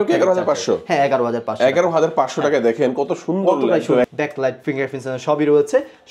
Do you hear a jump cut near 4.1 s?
yes; 1 cut; at 4.1 s

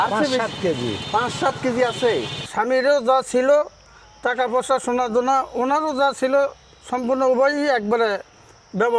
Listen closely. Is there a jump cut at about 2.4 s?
yes; 1 cut; at 2.4 s

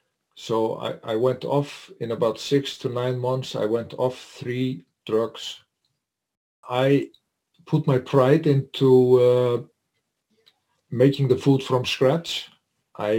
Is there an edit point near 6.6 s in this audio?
yes; 1 cut; at 6.6 s

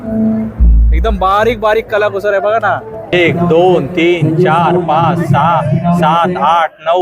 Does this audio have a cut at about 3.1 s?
yes; 1 cut; at 3.1 s

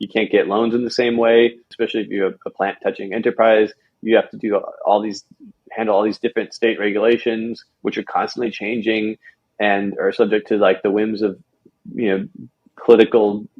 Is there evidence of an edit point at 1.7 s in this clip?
yes; 1 cut; at 1.7 s

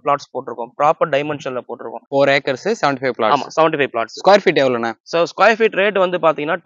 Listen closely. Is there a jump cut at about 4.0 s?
no; 1 cut; at 2.0 s

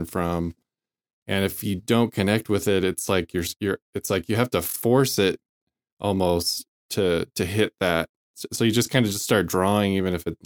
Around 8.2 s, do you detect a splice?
no; 0 cuts

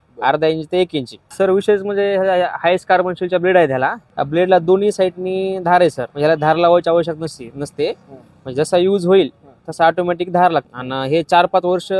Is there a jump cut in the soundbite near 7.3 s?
no; 4 cuts; at 1.2 s, 4.0 s, 6.1 s, 10.8 s

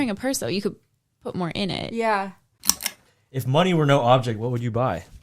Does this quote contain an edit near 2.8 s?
yes; 1 cut; at 2.8 s

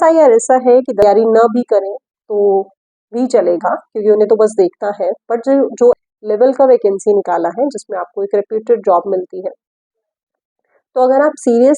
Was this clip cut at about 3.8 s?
no; 2 cuts; at 1.0 s, 6.0 s

